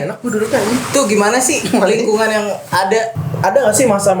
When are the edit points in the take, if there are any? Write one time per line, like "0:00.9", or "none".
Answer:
0:03.2